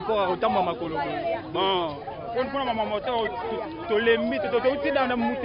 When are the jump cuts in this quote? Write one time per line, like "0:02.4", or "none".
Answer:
none